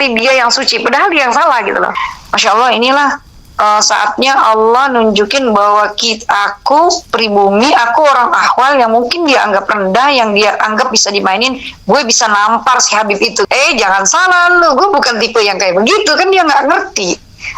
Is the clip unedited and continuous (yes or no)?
no